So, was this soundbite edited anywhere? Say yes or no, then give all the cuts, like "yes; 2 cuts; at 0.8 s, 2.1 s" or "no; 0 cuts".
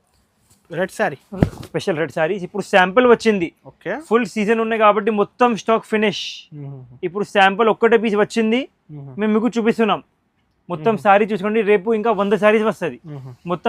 no; 0 cuts